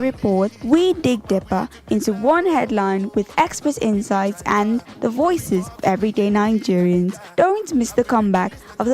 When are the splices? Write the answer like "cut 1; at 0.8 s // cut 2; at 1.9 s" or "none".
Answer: none